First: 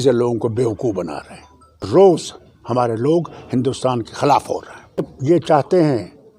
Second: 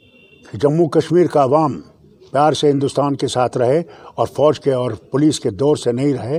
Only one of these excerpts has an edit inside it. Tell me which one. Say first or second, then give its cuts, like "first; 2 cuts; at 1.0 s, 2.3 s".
first; 2 cuts; at 1.9 s, 5.1 s